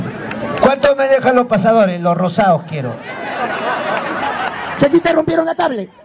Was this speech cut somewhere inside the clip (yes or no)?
yes